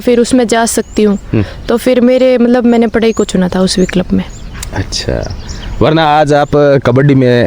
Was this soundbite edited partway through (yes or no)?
no